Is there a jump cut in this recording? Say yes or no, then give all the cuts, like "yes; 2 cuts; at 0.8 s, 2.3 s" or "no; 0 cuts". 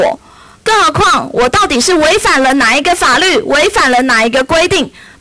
no; 0 cuts